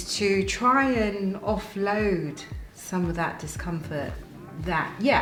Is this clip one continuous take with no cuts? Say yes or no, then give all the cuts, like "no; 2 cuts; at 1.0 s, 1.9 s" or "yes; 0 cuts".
yes; 0 cuts